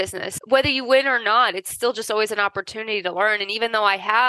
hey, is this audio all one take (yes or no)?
yes